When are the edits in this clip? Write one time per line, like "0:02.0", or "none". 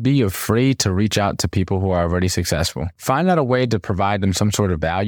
none